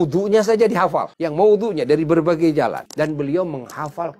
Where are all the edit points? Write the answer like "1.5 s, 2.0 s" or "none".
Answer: 1.2 s, 2.8 s